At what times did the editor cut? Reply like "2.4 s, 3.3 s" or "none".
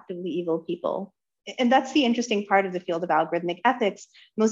1.3 s